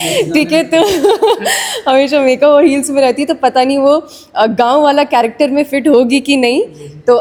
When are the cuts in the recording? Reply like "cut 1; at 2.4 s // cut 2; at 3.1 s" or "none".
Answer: none